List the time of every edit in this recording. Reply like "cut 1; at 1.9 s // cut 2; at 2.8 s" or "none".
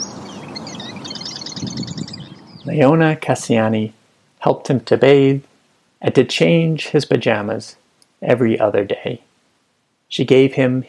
cut 1; at 2.4 s